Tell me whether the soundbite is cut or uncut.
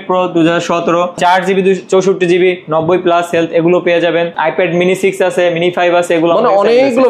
cut